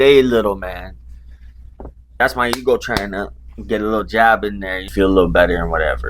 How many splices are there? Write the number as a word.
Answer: two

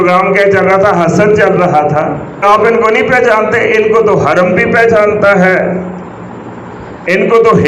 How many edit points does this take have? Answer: one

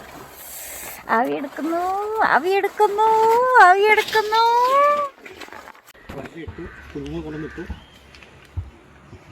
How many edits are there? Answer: one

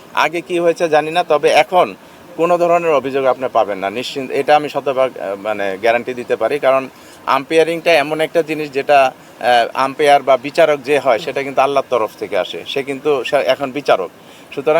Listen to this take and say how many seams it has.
zero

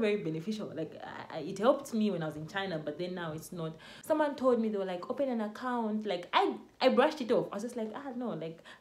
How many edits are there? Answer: one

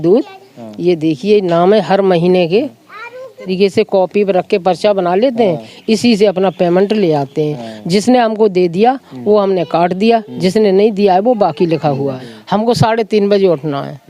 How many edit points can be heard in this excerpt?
two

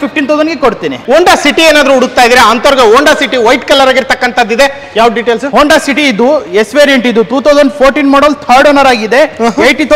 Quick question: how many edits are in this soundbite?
one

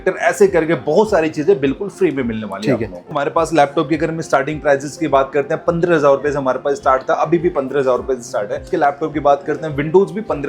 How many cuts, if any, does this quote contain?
two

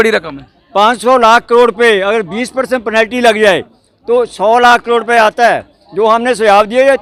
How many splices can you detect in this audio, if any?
zero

